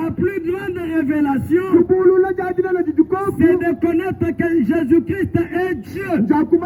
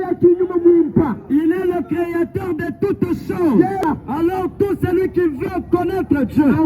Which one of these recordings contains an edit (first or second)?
second